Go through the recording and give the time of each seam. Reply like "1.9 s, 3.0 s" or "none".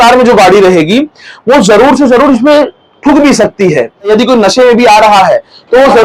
4.1 s